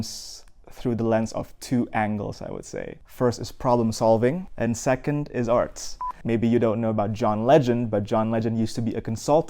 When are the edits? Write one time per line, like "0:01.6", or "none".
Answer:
0:03.0
0:04.5
0:06.1